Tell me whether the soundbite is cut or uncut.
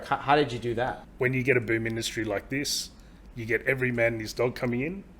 cut